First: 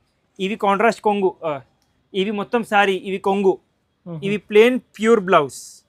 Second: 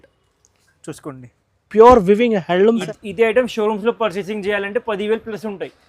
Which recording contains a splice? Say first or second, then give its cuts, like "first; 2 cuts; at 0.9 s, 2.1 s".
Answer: second; 1 cut; at 2.8 s